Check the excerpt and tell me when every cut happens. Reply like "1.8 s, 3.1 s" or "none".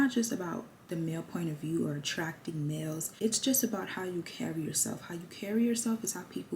3.1 s

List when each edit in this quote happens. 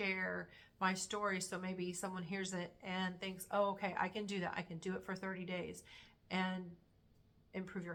none

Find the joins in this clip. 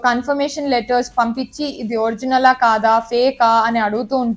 none

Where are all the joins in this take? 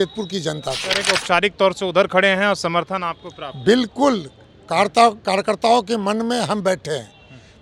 0.9 s

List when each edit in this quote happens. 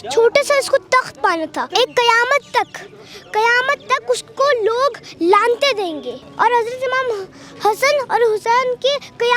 1.6 s, 6.2 s

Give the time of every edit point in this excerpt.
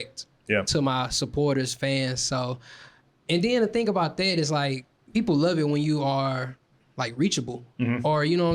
4.9 s

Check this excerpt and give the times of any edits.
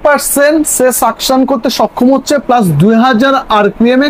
none

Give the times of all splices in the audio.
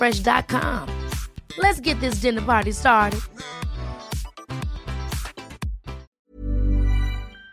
6.2 s

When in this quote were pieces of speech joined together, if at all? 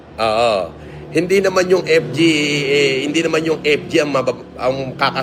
none

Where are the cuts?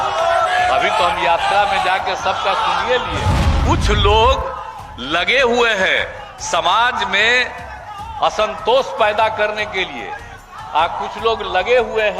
3.6 s

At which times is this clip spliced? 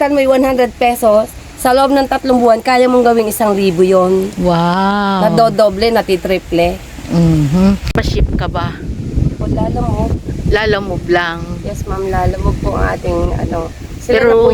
none

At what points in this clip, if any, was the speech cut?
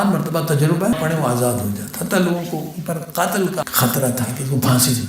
0.9 s, 3.6 s

